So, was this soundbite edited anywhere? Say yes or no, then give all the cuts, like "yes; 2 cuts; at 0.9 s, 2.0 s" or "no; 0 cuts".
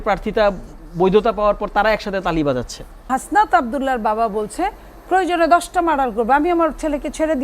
yes; 1 cut; at 3.1 s